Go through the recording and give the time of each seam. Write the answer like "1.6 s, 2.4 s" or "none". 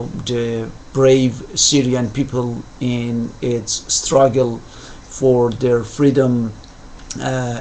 3.3 s